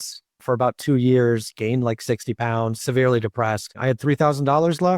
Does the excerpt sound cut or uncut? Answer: cut